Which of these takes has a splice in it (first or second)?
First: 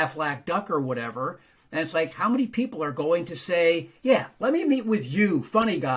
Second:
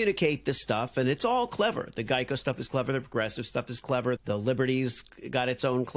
second